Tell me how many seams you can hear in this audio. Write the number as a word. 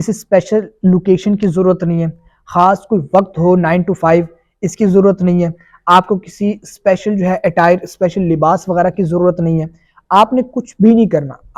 zero